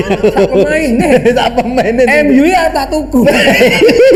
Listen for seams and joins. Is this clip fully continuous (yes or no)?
yes